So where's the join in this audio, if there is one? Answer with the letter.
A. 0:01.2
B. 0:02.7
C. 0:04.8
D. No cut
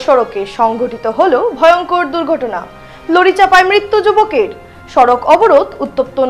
D